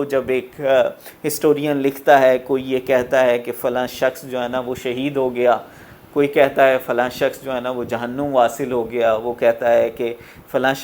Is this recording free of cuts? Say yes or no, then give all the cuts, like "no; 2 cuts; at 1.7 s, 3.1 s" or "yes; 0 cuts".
yes; 0 cuts